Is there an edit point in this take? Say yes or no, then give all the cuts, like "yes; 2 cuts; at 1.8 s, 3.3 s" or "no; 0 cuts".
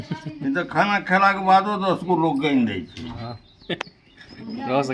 no; 0 cuts